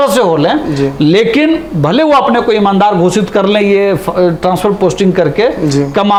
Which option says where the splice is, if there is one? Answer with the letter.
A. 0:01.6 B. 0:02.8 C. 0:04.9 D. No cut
D